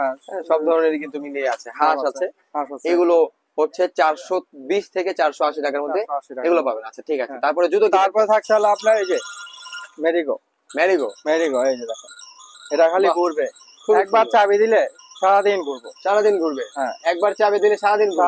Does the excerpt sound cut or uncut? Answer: uncut